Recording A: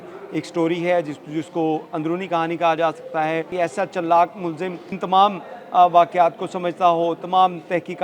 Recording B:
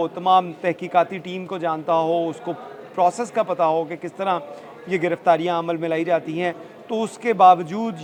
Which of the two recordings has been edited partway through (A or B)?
A